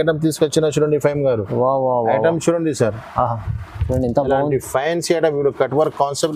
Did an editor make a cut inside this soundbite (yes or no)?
no